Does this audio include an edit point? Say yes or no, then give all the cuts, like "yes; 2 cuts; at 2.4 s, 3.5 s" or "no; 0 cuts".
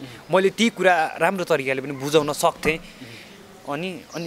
no; 0 cuts